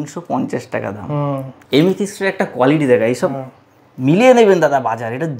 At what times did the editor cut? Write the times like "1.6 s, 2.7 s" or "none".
1.6 s